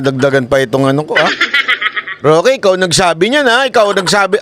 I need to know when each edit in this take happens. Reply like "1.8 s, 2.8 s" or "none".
none

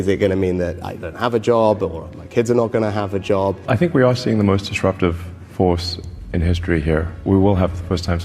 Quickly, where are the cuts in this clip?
3.6 s, 7.1 s

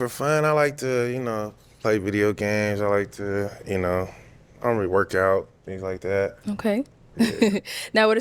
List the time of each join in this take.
none

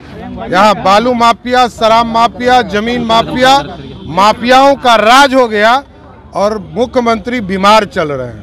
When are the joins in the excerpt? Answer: none

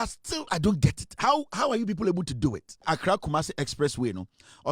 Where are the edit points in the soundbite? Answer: 2.8 s

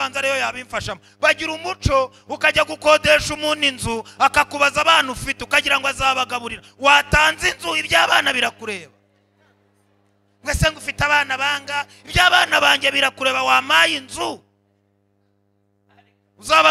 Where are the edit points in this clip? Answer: none

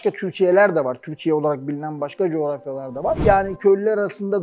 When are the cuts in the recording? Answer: 3.2 s

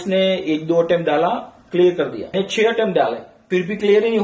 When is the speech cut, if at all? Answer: 2.3 s, 3.3 s

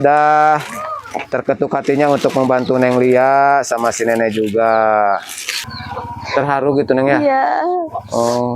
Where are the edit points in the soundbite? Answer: 5.7 s

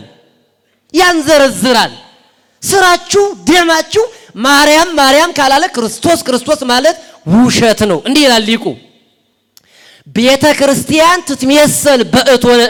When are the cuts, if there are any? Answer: none

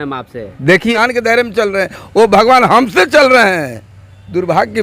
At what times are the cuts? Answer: 0.9 s

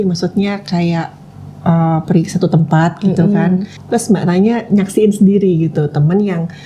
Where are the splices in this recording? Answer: 3.7 s

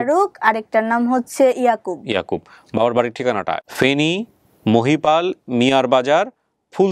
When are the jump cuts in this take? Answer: 3.6 s

